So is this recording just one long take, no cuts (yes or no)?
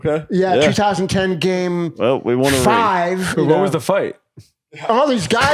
no